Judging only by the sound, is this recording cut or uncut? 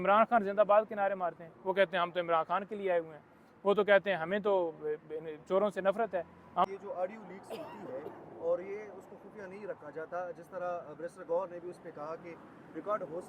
cut